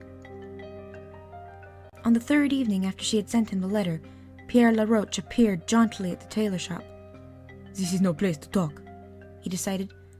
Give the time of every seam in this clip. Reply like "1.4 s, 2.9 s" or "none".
8.8 s